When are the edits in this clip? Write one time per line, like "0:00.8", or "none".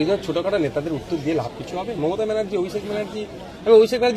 none